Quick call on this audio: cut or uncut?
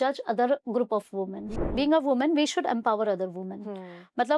cut